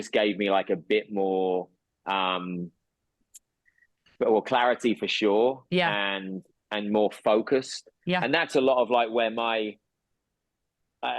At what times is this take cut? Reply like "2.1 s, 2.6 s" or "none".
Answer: none